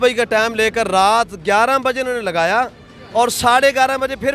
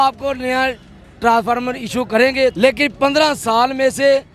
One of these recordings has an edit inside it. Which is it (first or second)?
second